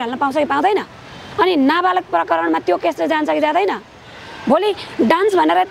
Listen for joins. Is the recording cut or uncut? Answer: uncut